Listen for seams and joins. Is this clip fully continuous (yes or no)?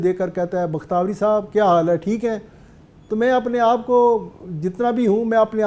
yes